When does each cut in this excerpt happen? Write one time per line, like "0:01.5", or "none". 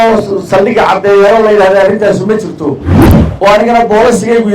0:03.2